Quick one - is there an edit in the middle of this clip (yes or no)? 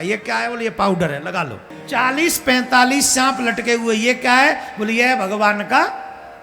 yes